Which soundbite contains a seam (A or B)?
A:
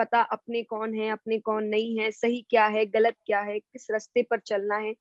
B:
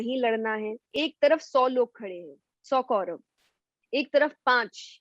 B